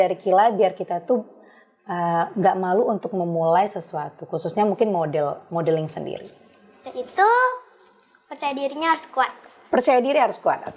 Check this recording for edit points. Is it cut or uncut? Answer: uncut